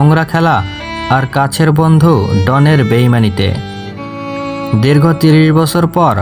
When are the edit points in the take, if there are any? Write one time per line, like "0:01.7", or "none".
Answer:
none